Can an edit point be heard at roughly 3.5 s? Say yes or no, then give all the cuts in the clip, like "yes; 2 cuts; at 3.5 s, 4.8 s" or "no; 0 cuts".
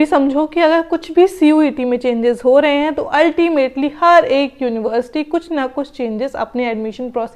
no; 0 cuts